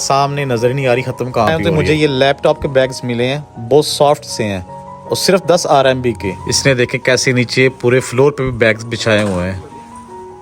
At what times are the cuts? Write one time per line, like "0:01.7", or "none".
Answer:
0:01.6
0:06.4